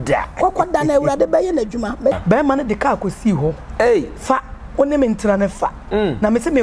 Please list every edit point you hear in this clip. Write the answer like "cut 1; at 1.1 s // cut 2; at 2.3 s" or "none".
cut 1; at 2.2 s